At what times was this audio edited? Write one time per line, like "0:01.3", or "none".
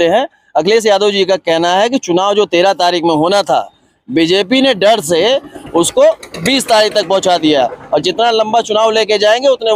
none